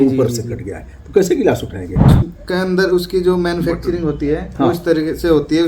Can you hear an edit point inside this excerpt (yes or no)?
yes